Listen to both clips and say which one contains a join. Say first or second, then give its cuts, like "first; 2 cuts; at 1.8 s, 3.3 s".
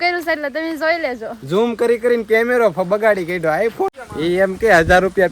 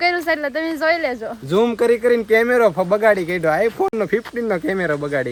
first; 1 cut; at 3.9 s